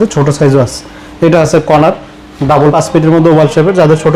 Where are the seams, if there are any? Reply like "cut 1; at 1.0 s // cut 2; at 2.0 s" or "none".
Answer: cut 1; at 2.7 s